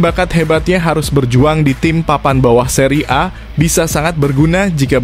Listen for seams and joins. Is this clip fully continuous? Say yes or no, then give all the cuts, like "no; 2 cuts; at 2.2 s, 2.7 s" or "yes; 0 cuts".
yes; 0 cuts